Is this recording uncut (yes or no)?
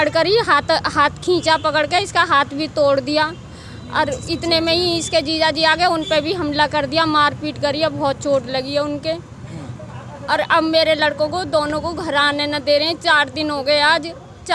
yes